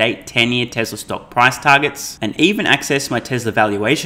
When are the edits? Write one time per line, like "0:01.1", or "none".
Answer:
none